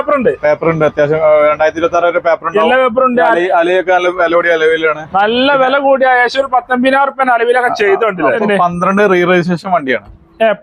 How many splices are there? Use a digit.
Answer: 1